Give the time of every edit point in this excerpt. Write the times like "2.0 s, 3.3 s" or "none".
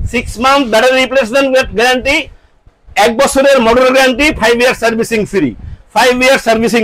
none